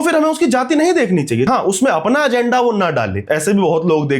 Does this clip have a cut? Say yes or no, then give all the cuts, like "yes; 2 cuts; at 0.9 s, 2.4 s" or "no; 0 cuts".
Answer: yes; 2 cuts; at 1.5 s, 3.2 s